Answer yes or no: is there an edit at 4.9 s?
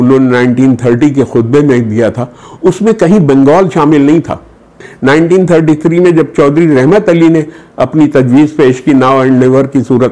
yes